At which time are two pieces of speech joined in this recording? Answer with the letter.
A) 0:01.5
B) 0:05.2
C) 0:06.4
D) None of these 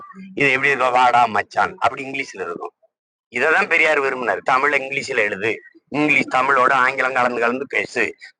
D